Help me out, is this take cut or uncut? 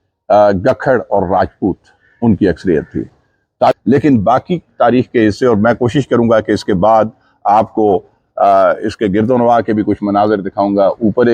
cut